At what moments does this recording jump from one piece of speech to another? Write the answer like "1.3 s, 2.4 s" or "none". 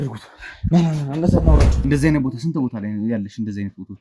1.7 s